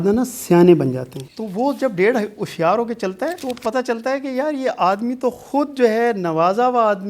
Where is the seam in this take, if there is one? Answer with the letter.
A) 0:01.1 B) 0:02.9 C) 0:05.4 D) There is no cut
A